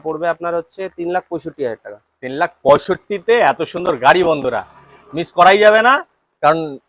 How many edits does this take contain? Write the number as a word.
zero